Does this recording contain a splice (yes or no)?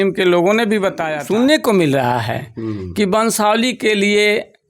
yes